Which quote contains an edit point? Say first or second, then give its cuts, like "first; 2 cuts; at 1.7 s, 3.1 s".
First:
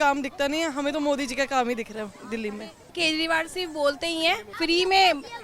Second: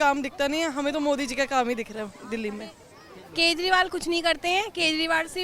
first; 2 cuts; at 2.9 s, 4.5 s